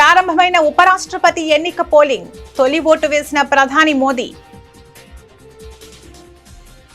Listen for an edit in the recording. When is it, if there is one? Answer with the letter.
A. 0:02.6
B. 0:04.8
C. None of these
B